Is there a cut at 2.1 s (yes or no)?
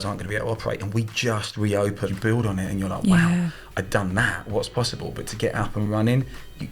yes